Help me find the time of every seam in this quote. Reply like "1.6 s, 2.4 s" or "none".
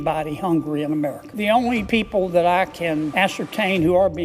none